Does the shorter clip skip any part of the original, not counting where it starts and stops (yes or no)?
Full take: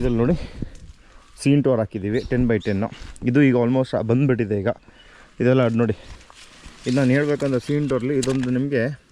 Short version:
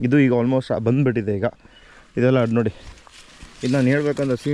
no